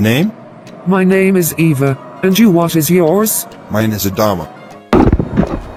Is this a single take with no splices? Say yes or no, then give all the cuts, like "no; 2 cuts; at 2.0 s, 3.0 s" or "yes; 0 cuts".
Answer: yes; 0 cuts